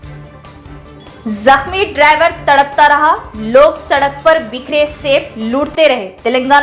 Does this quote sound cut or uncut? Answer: uncut